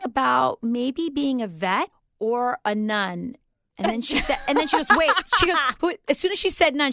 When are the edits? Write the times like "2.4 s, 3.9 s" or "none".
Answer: 2.0 s